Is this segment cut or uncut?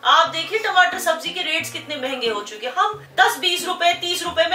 cut